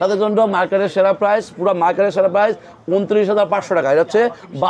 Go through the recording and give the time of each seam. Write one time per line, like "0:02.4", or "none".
none